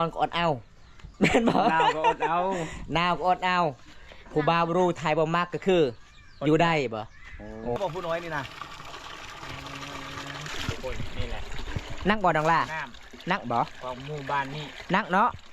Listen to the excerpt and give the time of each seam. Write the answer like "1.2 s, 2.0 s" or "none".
7.8 s, 10.5 s